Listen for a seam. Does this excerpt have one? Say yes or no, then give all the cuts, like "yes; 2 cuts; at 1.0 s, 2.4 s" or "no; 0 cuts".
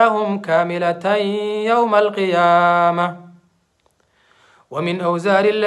no; 0 cuts